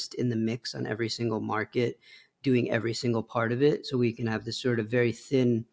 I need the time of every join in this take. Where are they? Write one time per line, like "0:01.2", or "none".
none